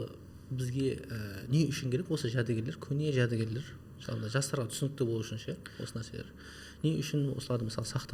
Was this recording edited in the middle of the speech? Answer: no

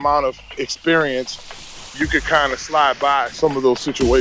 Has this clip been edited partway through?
yes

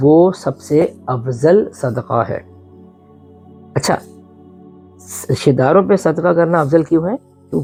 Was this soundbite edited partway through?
no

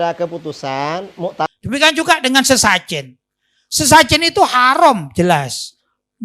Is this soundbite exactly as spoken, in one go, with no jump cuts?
no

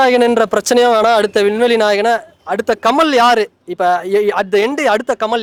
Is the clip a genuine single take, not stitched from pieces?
yes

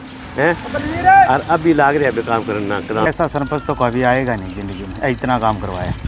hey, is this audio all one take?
no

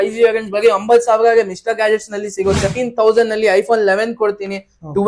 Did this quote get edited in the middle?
yes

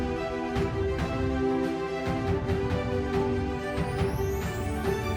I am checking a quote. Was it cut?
no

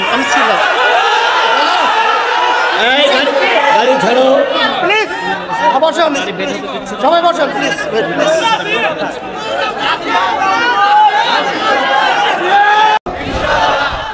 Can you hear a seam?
yes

